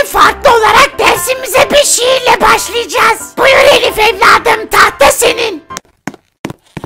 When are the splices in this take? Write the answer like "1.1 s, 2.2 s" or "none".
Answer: 5.7 s